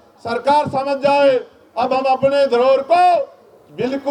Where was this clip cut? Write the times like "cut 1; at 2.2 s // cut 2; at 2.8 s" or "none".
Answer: none